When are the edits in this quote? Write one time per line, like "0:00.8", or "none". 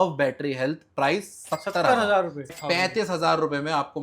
0:02.5